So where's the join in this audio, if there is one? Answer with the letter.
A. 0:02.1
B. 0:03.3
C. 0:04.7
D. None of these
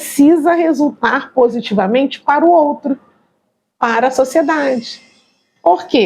D